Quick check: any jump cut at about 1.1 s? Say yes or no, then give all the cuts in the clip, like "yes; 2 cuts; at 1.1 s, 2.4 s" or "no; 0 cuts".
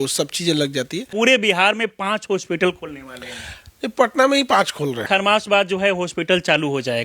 yes; 2 cuts; at 1.1 s, 5.0 s